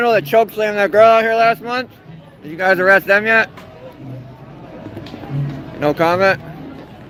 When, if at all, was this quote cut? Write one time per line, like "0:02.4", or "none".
none